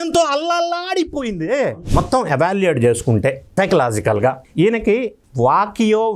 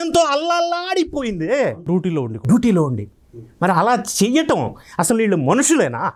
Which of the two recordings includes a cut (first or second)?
first